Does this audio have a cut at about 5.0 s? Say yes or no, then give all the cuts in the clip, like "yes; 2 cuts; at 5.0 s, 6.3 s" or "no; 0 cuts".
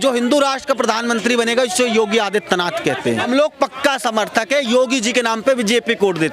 no; 1 cut; at 3.2 s